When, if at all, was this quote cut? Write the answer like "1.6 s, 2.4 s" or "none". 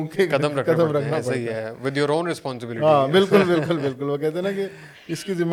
none